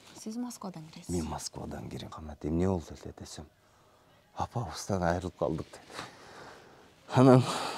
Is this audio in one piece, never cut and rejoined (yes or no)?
no